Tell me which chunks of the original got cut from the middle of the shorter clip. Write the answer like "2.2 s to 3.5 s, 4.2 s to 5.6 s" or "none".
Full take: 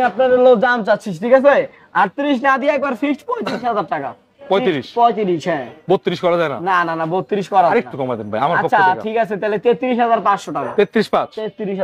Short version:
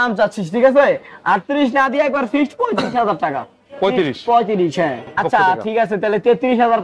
5.8 s to 8.6 s